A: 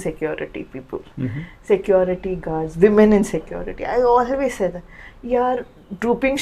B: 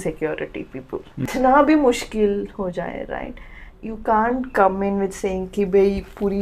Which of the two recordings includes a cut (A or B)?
B